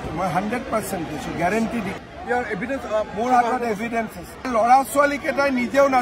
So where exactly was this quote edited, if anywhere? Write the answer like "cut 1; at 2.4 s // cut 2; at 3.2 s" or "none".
cut 1; at 2.0 s // cut 2; at 4.5 s